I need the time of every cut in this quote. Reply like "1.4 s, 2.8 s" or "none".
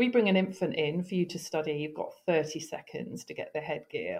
none